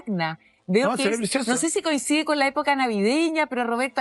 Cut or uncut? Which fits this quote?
uncut